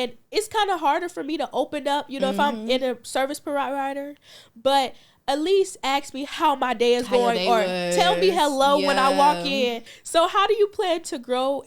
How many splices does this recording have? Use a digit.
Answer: 1